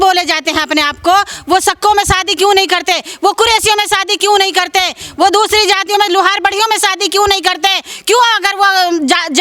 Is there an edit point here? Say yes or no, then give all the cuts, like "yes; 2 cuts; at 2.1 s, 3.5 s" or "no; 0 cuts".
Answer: no; 0 cuts